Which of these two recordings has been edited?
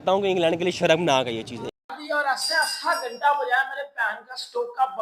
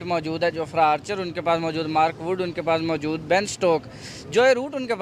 first; 1 cut; at 1.8 s

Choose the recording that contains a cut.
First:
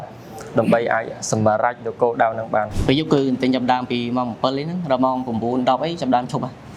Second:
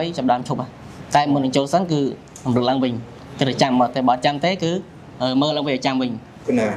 first; 1 cut; at 2.7 s

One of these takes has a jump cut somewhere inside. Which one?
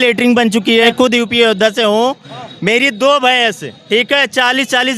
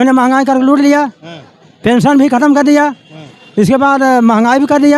first; 1 cut; at 0.9 s

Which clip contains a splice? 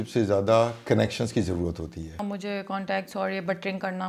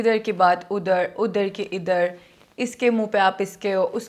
first; 1 cut; at 2.2 s

